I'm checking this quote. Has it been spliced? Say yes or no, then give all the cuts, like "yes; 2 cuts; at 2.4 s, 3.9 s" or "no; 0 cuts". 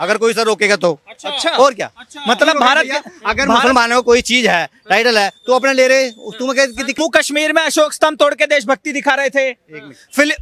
yes; 1 cut; at 7.0 s